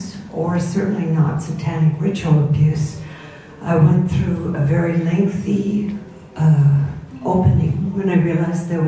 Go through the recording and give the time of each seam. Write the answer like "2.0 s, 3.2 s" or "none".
6.7 s